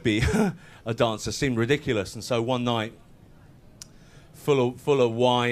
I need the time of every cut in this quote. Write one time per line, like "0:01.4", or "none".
0:01.3